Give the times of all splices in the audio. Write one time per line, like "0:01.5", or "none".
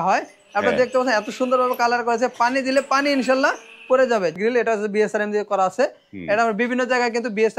0:04.3